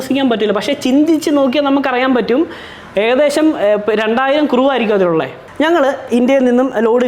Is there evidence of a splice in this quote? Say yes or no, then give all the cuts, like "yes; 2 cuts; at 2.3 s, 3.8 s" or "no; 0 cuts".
yes; 1 cut; at 5.4 s